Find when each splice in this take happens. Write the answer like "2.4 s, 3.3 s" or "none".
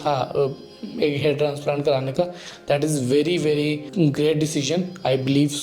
3.8 s